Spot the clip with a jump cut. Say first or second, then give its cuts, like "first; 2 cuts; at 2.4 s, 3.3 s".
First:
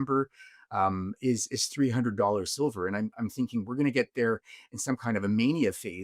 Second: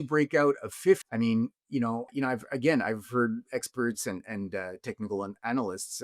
second; 2 cuts; at 1.1 s, 2.1 s